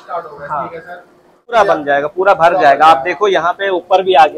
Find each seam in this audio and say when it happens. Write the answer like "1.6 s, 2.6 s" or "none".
1.5 s

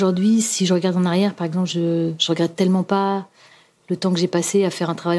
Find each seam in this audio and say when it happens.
none

